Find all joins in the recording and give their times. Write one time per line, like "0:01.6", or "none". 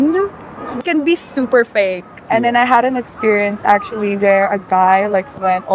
0:00.8
0:02.2